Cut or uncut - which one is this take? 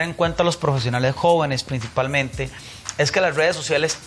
uncut